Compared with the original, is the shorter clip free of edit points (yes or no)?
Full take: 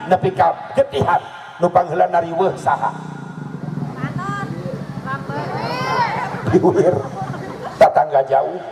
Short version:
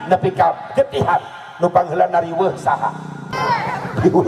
no